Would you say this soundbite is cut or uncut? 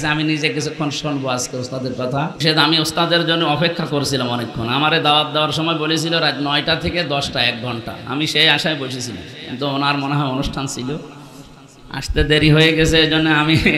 cut